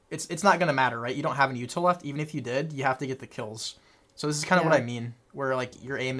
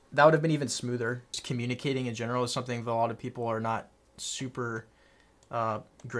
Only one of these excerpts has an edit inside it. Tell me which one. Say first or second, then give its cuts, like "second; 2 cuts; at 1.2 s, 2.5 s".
second; 1 cut; at 1.4 s